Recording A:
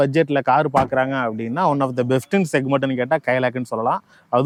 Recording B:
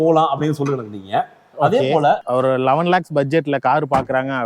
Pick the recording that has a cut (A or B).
B